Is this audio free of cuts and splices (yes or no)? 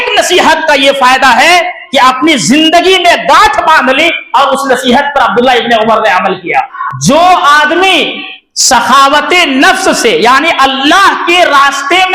no